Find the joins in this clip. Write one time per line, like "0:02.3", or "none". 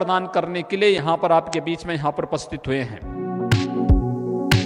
0:03.1